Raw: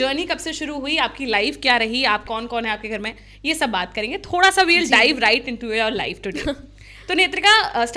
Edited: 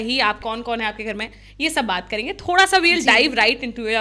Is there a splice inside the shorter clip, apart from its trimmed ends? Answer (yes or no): no